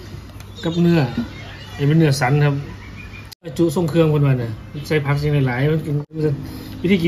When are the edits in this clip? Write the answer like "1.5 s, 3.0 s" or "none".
3.5 s, 6.2 s